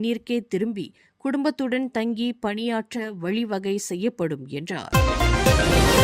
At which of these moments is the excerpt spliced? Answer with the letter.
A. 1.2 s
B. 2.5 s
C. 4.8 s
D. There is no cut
C